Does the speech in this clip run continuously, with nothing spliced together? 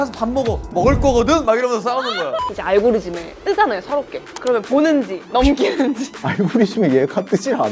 no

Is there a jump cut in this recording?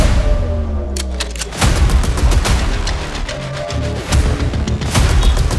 no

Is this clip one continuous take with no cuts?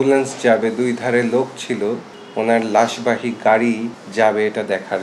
no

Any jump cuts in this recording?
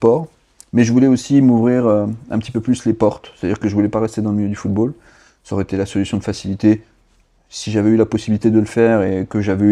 no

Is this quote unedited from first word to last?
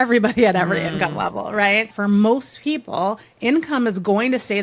no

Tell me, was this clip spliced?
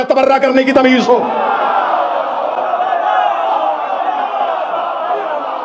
no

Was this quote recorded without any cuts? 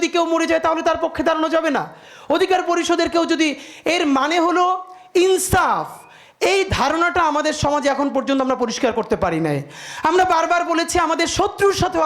yes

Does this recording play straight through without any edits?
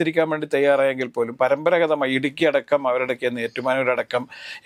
yes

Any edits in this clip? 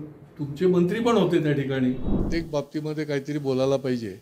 yes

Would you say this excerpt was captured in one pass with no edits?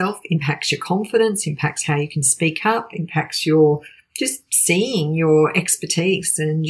yes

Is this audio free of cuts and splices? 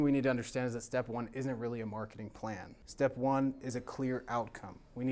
no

